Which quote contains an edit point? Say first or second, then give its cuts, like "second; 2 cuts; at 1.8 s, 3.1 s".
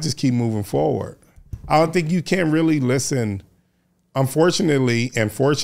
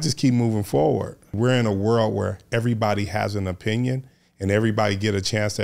second; 1 cut; at 1.3 s